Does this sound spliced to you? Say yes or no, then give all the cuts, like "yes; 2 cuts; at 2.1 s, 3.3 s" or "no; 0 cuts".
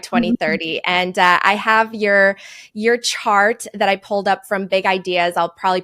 no; 0 cuts